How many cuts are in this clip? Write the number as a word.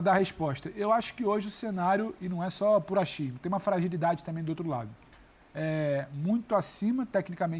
zero